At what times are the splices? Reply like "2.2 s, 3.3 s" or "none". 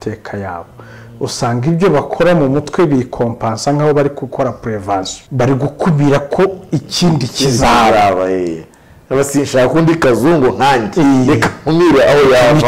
5.2 s